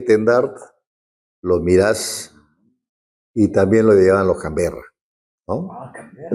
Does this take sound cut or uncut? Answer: uncut